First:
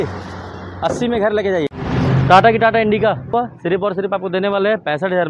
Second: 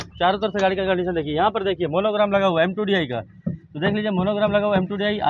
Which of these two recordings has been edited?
first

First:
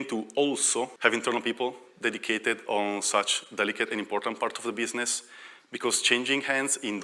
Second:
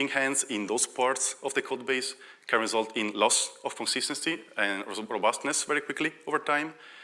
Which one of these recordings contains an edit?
first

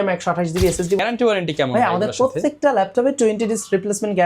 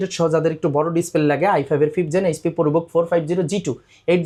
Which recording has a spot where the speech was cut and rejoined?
first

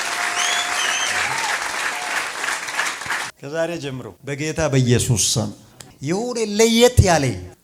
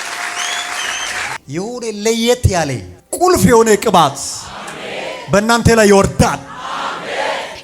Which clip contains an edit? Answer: second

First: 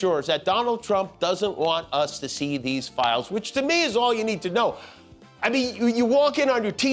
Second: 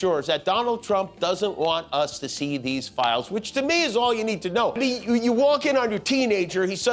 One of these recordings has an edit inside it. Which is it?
second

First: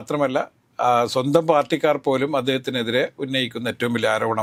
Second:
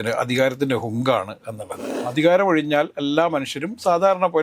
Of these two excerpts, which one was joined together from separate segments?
second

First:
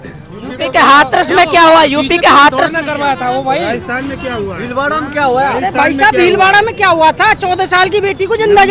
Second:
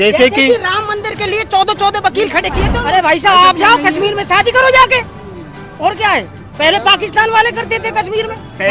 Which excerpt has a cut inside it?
second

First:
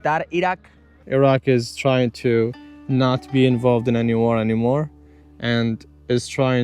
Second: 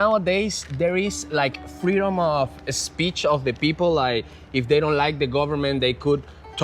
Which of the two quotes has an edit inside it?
first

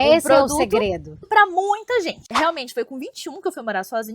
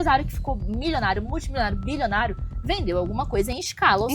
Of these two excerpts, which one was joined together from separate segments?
first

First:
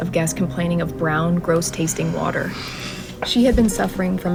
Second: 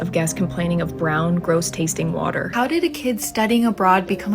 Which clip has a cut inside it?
second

